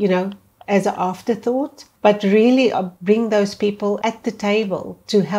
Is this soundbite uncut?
no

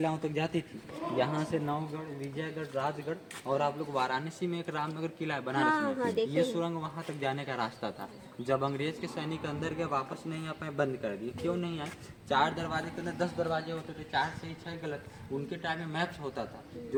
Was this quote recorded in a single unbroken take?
yes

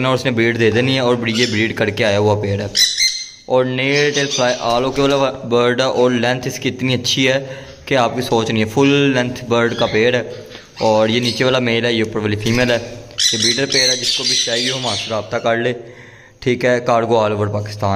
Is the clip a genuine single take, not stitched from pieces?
yes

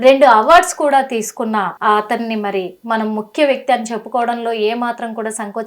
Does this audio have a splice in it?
yes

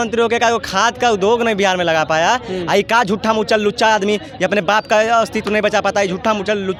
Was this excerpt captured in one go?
yes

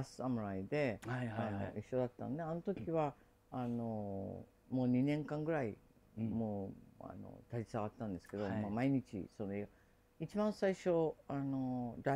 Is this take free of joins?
yes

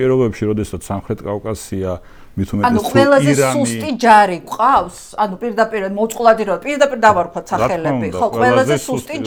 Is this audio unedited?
yes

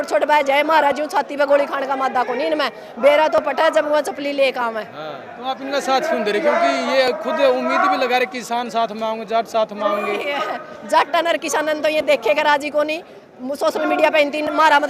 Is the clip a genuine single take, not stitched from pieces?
yes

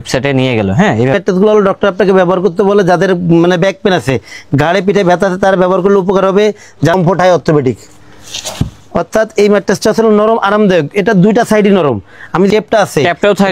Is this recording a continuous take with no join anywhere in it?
no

